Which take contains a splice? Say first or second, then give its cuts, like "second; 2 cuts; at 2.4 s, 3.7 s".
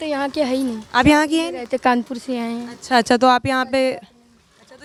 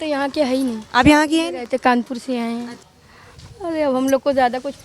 second; 1 cut; at 2.7 s